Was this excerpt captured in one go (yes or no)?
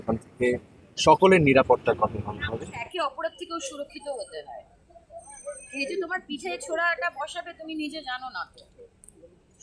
no